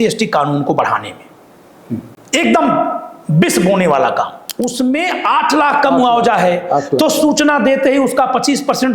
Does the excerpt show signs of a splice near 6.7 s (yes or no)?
no